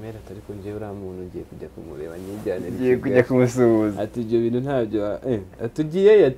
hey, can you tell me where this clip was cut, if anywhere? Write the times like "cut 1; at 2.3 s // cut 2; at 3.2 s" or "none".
none